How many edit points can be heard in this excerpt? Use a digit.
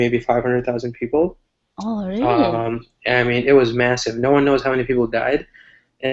1